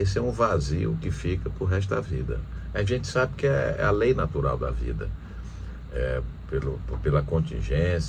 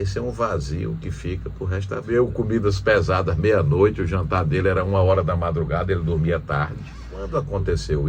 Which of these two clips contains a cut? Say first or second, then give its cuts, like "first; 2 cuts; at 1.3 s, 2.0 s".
second; 2 cuts; at 2.0 s, 7.2 s